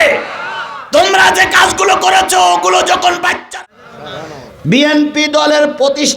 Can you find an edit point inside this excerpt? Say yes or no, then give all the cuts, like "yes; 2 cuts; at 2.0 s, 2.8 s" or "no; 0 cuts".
yes; 1 cut; at 3.5 s